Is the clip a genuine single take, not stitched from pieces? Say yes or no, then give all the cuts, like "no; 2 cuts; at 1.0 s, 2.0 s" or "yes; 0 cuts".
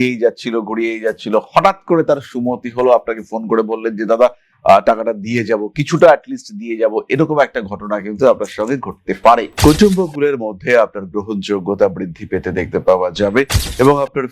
no; 1 cut; at 9.5 s